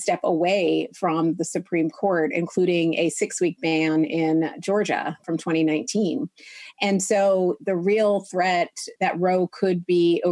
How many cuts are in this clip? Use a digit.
0